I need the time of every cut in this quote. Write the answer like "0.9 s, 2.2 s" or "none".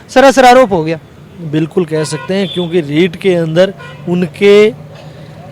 none